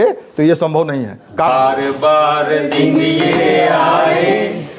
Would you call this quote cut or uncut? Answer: cut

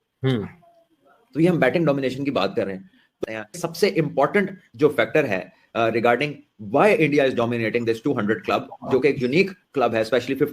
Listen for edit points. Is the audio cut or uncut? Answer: cut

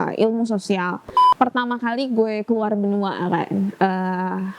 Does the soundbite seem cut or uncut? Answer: cut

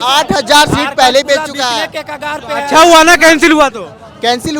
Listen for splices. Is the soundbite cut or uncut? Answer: uncut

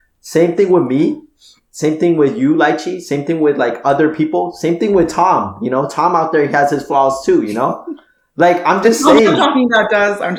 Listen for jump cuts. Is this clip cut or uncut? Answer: uncut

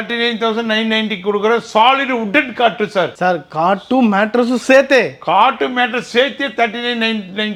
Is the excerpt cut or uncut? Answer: uncut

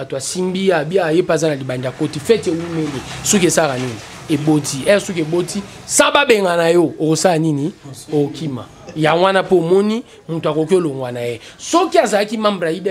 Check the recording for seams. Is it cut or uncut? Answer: uncut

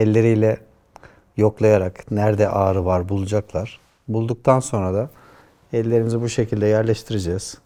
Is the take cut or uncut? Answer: uncut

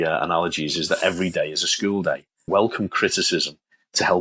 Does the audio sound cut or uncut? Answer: cut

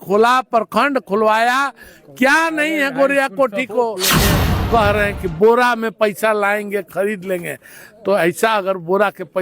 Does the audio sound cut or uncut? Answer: cut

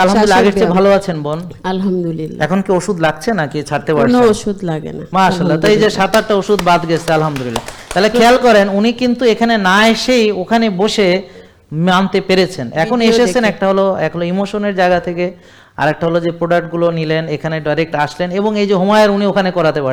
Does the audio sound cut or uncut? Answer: uncut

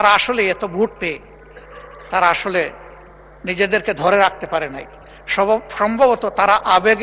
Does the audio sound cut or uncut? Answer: uncut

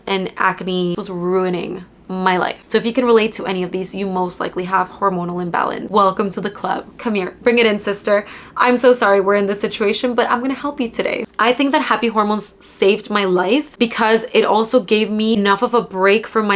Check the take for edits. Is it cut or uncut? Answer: cut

